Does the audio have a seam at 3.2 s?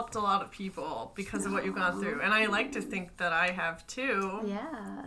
no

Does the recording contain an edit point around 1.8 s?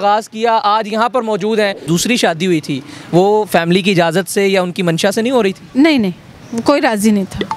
yes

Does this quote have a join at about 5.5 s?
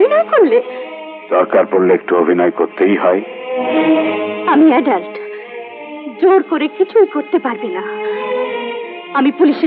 no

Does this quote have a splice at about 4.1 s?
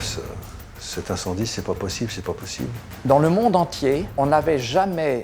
yes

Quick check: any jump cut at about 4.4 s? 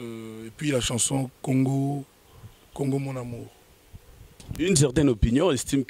yes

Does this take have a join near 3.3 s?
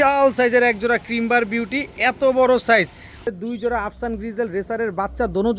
yes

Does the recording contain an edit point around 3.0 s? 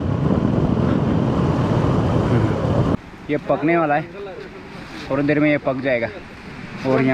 yes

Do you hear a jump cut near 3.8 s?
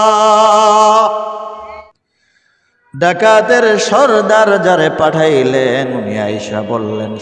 no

